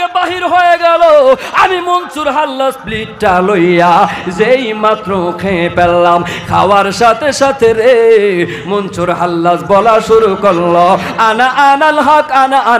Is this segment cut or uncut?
uncut